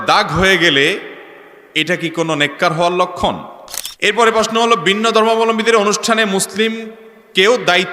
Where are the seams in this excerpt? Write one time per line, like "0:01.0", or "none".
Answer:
0:04.1